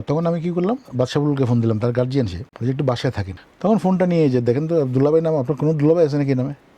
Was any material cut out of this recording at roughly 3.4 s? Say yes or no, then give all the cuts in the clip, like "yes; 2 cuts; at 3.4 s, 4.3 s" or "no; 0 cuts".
yes; 2 cuts; at 2.4 s, 3.4 s